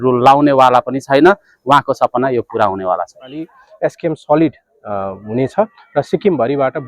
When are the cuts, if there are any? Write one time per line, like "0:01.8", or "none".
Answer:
0:03.6